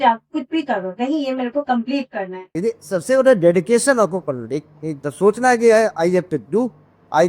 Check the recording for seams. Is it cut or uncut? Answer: cut